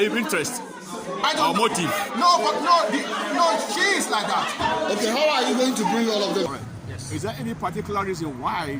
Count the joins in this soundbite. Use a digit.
1